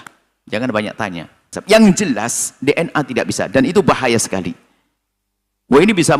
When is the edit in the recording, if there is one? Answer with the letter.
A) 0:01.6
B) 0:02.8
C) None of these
A